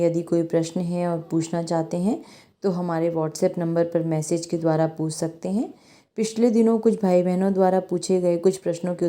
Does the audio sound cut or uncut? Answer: uncut